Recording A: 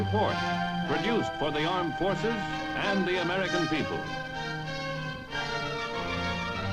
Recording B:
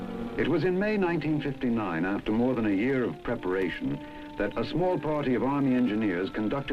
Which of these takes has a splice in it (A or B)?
B